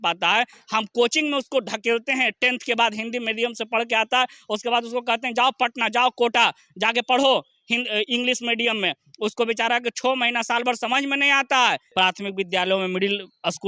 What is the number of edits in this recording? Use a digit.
1